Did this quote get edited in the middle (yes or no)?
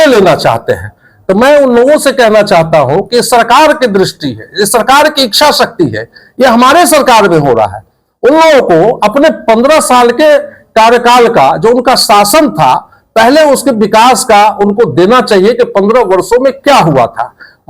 no